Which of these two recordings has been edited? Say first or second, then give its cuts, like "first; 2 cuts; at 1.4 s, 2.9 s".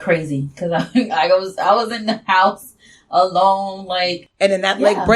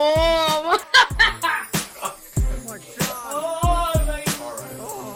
first; 1 cut; at 4.2 s